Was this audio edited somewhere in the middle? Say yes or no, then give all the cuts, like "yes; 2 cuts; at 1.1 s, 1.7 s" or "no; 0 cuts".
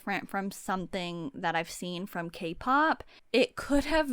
yes; 1 cut; at 3.1 s